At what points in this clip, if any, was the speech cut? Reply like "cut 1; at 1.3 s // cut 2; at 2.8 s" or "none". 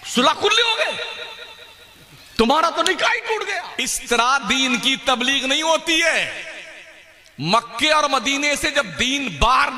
cut 1; at 3.6 s